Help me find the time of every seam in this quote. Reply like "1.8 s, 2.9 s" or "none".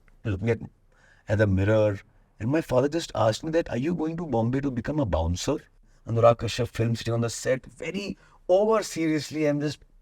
5.9 s